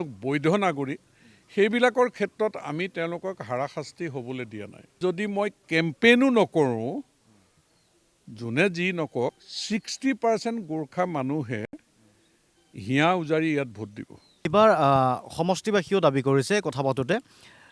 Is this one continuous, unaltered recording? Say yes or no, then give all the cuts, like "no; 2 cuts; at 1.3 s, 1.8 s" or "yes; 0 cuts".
no; 2 cuts; at 5.0 s, 14.5 s